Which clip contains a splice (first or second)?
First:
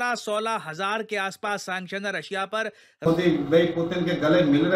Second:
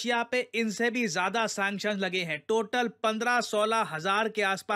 first